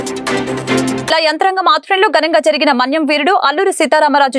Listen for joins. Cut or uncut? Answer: cut